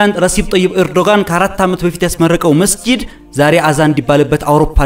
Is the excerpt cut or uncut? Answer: uncut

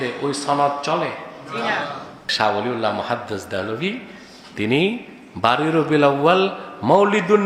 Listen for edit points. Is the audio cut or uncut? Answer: cut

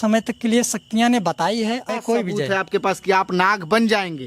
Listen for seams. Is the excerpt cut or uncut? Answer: cut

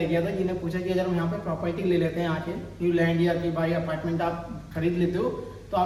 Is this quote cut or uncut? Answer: uncut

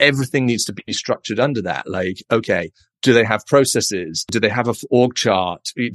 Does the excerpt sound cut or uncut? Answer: cut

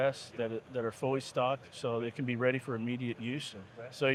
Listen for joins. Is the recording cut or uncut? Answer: uncut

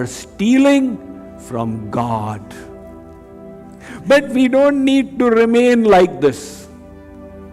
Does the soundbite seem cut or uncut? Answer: cut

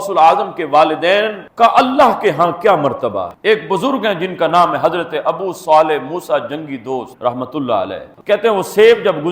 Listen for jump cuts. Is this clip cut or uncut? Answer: cut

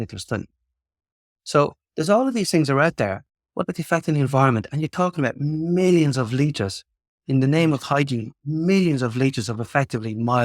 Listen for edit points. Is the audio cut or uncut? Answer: cut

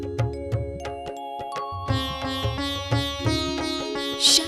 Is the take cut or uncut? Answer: cut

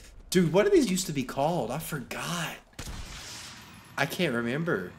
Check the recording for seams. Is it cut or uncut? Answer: uncut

